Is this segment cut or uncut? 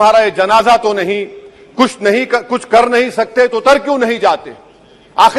uncut